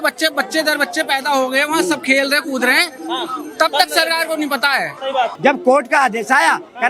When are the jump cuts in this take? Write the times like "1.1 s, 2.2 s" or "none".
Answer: 5.3 s